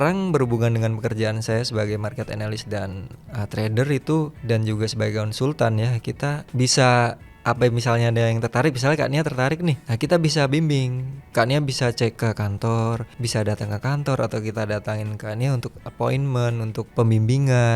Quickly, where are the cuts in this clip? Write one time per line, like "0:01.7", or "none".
0:04.4
0:06.4
0:07.3
0:09.9
0:12.2
0:13.1
0:16.8